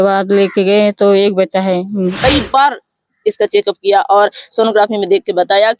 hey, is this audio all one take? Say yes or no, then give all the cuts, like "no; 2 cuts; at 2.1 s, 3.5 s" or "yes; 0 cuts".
no; 1 cut; at 2.2 s